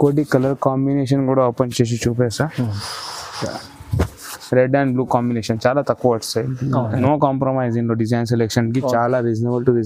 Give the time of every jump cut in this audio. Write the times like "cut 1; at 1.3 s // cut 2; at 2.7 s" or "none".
cut 1; at 7.0 s